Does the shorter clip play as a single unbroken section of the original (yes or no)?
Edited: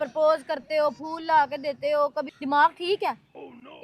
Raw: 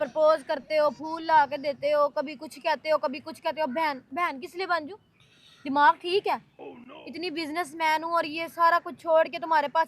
no